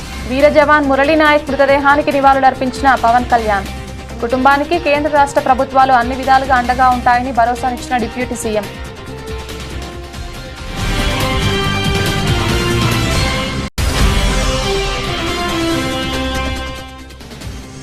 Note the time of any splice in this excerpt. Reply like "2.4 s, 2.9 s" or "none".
16.8 s